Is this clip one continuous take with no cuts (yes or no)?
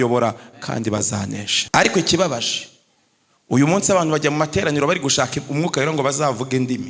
no